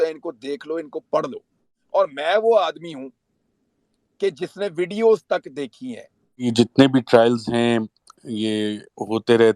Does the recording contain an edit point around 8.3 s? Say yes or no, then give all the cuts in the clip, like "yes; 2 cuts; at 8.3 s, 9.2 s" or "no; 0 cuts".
no; 2 cuts; at 1.7 s, 6.5 s